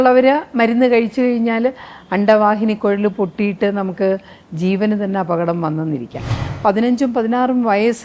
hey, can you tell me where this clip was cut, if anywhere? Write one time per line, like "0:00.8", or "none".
0:06.4